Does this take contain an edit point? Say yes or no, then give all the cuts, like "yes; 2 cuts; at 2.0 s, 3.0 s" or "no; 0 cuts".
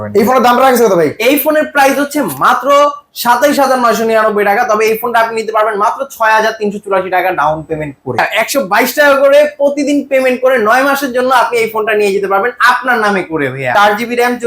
yes; 2 cuts; at 8.3 s, 13.7 s